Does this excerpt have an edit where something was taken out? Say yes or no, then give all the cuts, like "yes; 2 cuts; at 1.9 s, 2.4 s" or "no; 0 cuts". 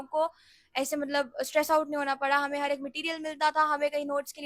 no; 0 cuts